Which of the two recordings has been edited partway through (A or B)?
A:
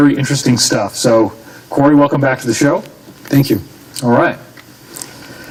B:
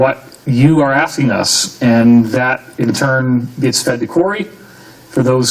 B